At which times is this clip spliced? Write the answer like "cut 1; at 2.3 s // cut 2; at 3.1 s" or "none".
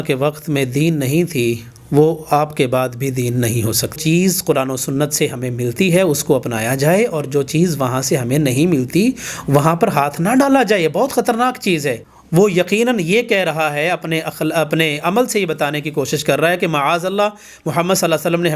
cut 1; at 4.0 s // cut 2; at 12.1 s